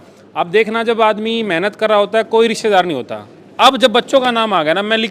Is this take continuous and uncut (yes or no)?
yes